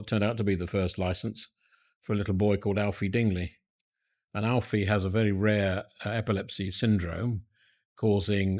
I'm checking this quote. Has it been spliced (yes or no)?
no